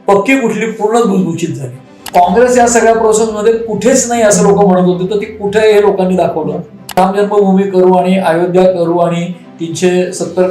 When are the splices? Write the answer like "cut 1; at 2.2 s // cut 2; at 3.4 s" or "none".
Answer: cut 1; at 7.0 s